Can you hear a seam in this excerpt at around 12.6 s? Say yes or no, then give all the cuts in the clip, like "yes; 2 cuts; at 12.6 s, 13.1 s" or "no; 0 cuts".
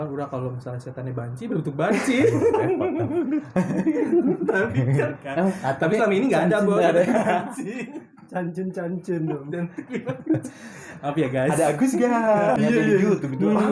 yes; 1 cut; at 12.6 s